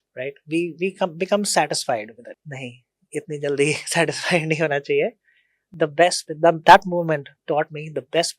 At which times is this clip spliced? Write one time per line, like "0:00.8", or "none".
none